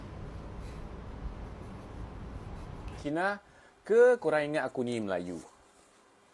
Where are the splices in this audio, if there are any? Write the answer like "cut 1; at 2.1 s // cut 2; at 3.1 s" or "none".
cut 1; at 3.0 s

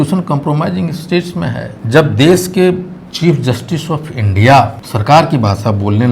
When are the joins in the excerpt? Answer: cut 1; at 1.7 s // cut 2; at 4.9 s

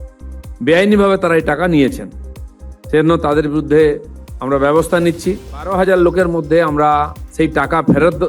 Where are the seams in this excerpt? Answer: cut 1; at 5.7 s

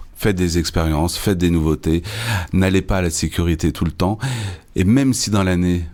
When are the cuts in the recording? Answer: none

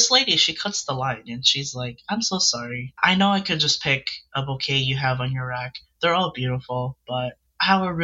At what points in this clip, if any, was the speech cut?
cut 1; at 3.0 s

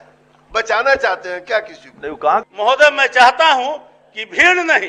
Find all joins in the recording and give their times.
cut 1; at 2.4 s

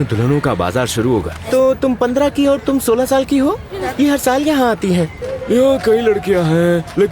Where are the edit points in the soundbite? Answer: cut 1; at 1.4 s // cut 2; at 3.8 s // cut 3; at 5.3 s

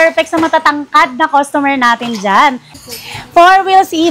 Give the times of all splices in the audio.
cut 1; at 2.7 s

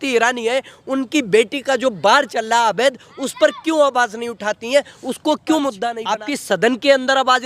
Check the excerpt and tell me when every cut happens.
cut 1; at 5.9 s

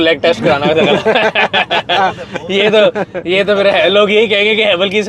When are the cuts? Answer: none

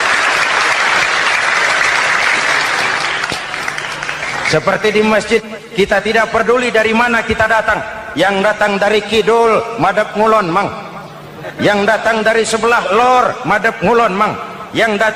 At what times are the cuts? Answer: none

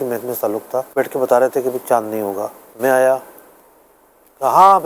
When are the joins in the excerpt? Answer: cut 1; at 0.9 s // cut 2; at 2.6 s

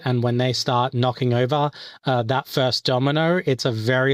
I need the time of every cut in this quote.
none

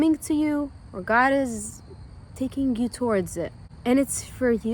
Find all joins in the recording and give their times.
cut 1; at 3.6 s

